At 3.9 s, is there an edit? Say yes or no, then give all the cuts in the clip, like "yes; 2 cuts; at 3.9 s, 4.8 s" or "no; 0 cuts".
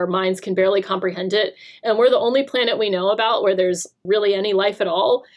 yes; 1 cut; at 3.9 s